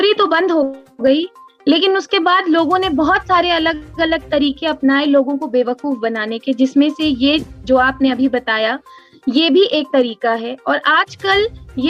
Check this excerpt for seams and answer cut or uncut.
uncut